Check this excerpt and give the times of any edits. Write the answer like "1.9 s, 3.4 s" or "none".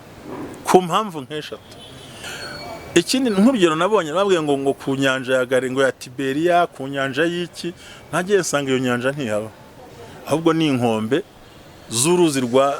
2.2 s